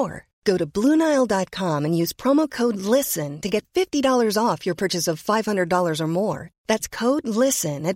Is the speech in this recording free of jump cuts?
yes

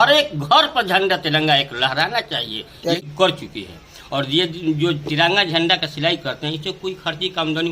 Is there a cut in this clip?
yes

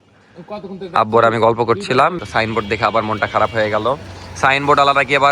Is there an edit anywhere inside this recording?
yes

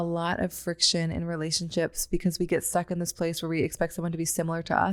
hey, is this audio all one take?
yes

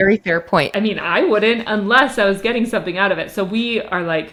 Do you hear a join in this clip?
no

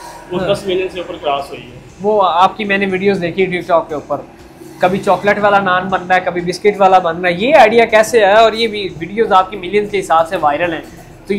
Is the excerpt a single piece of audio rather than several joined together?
yes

